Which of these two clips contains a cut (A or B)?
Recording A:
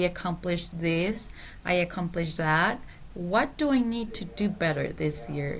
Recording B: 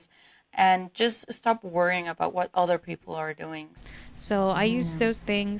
B